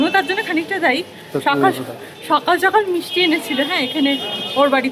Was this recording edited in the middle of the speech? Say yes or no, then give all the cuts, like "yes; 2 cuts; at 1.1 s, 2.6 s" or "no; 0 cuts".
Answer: no; 0 cuts